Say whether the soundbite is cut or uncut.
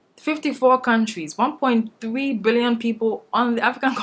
uncut